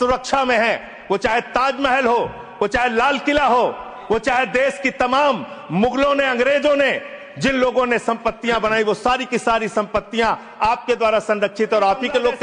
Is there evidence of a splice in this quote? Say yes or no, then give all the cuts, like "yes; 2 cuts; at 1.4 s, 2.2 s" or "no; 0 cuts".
no; 0 cuts